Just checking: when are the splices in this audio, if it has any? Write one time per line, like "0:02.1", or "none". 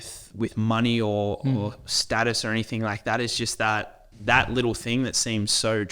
0:04.0